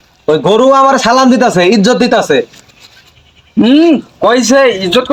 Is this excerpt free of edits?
yes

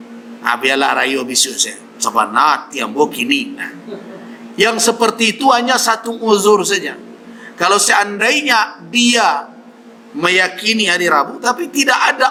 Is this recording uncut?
yes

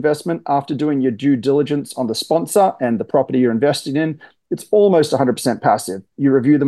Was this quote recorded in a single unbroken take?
yes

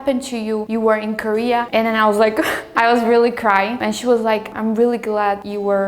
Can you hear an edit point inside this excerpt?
yes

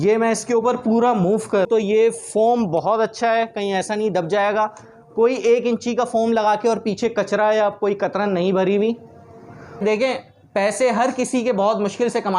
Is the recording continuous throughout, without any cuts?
no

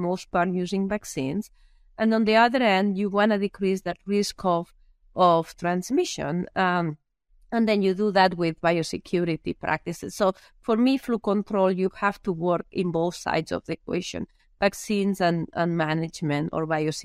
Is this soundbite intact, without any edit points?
yes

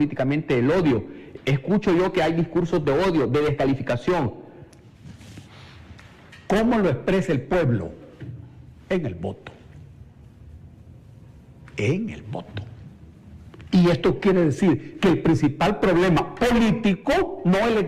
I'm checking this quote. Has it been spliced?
no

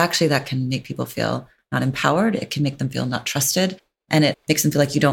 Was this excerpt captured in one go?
no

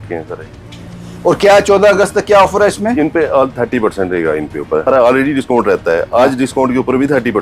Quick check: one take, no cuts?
no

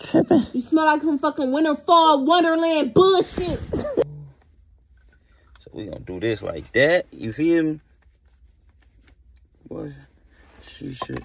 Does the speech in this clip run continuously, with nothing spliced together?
no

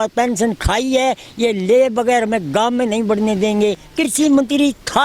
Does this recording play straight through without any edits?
no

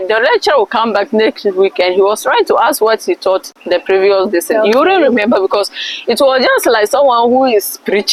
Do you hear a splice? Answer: no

